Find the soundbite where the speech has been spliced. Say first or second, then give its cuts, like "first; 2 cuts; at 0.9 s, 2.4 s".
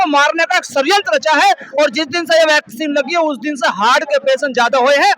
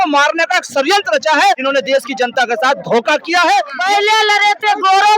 second; 2 cuts; at 1.6 s, 3.7 s